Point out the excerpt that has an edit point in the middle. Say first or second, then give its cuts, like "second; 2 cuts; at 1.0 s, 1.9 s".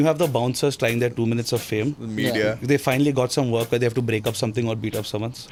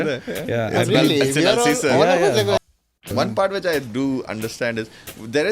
second; 1 cut; at 2.6 s